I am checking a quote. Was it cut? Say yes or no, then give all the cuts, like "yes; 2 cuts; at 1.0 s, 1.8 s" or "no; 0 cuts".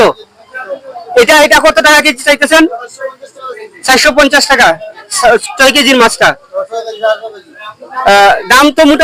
no; 0 cuts